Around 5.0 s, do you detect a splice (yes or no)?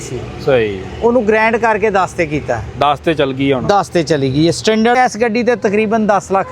yes